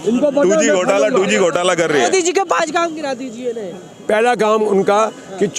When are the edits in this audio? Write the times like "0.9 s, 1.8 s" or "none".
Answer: 2.1 s